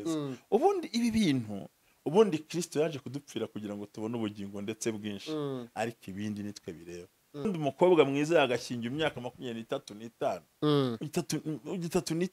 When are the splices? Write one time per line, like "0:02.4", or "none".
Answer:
0:07.5